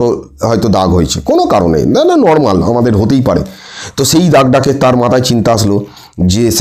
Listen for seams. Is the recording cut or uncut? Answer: uncut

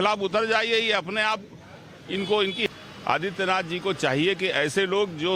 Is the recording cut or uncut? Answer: cut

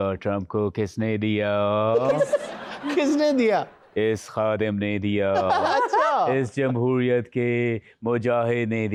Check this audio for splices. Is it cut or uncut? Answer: uncut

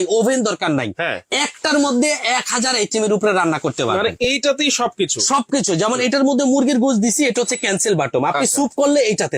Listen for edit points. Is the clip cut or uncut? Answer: uncut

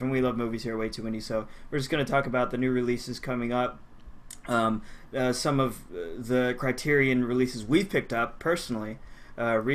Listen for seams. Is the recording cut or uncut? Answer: cut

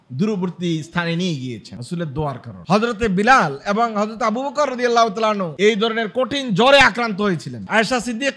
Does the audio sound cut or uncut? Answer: uncut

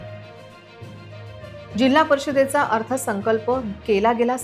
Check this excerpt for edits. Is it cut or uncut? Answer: uncut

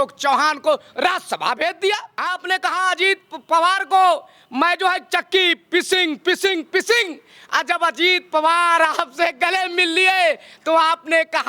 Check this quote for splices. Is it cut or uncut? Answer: cut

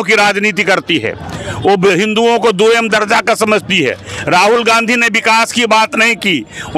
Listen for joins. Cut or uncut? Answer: uncut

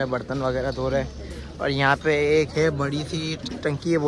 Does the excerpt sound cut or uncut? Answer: uncut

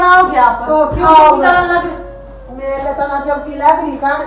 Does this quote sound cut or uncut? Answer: uncut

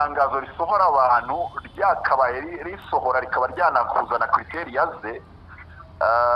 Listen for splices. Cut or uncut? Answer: uncut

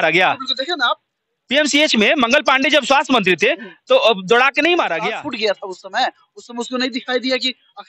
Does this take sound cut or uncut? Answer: cut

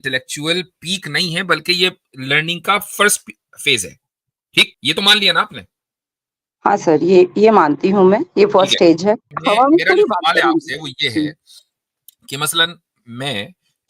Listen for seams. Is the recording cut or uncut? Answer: cut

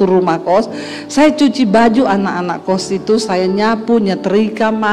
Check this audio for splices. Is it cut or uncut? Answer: uncut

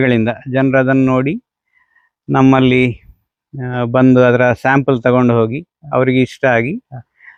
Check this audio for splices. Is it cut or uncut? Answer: uncut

